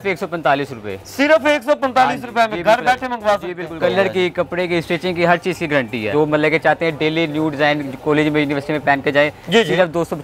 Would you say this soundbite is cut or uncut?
cut